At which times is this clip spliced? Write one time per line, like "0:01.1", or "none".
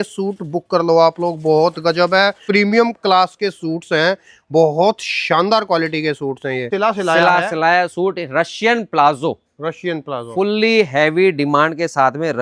0:02.4
0:06.7